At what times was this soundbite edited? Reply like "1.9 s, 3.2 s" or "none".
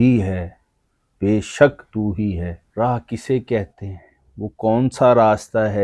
2.6 s